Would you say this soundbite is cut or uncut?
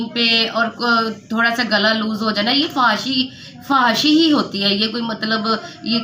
uncut